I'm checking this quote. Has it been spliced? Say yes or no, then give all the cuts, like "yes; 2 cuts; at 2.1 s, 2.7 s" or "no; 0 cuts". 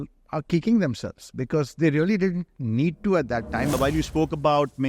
yes; 1 cut; at 3.7 s